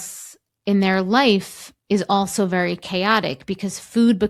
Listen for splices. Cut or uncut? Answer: uncut